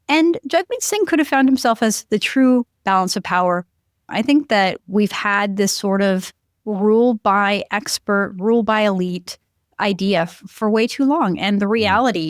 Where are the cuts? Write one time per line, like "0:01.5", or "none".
0:04.0